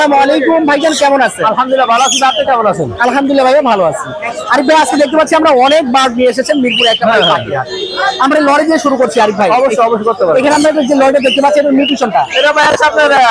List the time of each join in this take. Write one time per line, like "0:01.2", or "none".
none